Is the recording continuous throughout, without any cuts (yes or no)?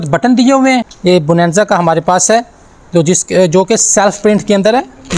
no